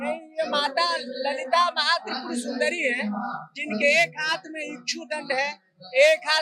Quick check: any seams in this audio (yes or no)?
no